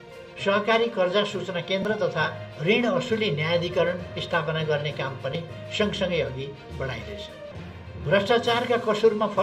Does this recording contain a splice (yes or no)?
yes